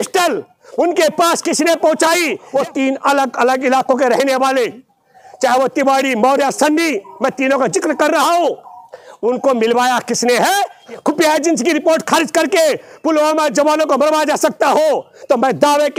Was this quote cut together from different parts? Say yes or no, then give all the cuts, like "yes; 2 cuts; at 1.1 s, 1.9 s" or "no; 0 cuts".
yes; 2 cuts; at 2.4 s, 10.8 s